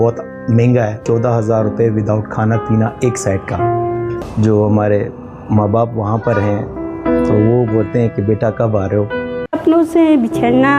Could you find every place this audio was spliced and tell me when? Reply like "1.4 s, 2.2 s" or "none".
1.0 s, 4.2 s, 9.5 s

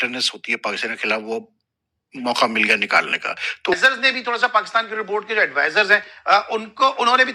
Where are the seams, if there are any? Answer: 3.7 s

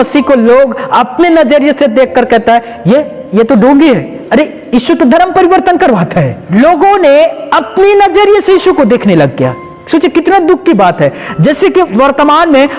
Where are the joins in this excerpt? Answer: 4.1 s, 6.4 s, 9.7 s

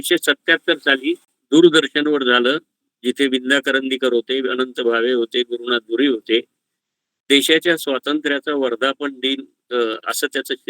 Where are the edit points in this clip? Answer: 1.3 s

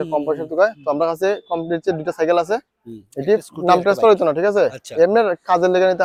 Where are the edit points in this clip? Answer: none

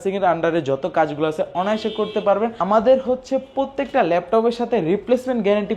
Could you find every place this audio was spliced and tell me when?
2.6 s

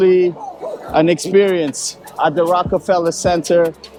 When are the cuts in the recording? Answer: none

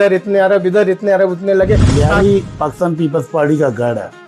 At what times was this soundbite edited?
1.9 s

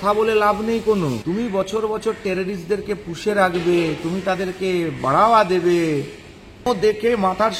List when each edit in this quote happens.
1.2 s, 6.6 s

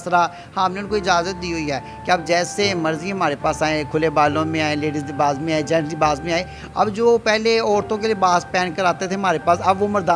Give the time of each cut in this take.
none

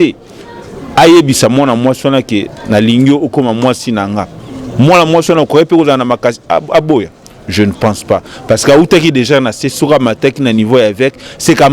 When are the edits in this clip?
none

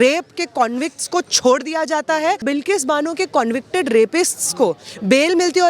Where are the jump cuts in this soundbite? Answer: 2.4 s

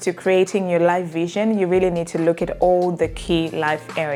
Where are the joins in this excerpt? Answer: none

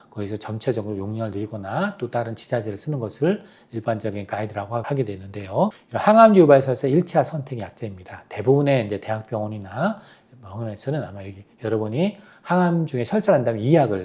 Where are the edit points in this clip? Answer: 4.8 s, 5.8 s

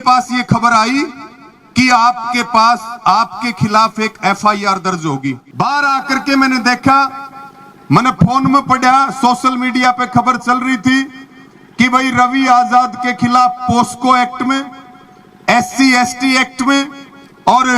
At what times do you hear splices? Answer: 5.4 s

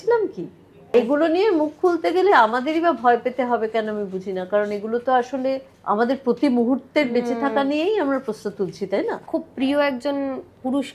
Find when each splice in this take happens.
0.9 s, 2.3 s, 5.7 s, 9.2 s

